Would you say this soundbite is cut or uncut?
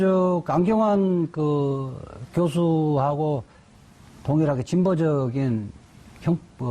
cut